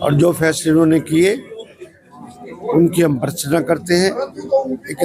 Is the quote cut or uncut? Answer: uncut